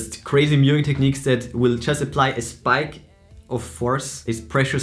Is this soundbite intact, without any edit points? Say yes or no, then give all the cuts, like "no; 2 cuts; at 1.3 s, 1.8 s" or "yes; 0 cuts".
yes; 0 cuts